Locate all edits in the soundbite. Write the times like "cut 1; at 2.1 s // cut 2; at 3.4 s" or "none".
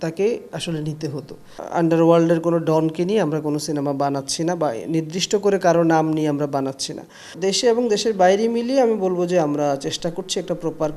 cut 1; at 1.6 s // cut 2; at 7.3 s